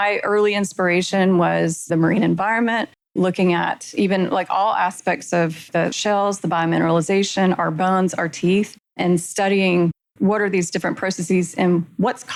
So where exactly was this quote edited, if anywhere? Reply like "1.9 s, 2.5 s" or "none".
none